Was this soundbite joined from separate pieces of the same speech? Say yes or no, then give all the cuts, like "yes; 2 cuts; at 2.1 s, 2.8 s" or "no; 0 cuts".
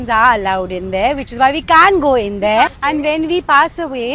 yes; 1 cut; at 2.7 s